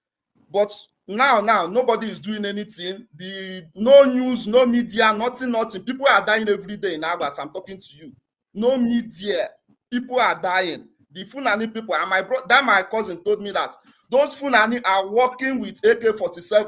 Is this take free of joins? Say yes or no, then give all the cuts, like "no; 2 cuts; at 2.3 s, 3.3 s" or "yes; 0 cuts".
yes; 0 cuts